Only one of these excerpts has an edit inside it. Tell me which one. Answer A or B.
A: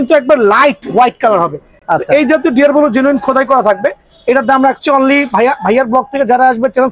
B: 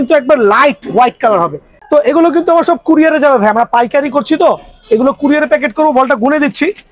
B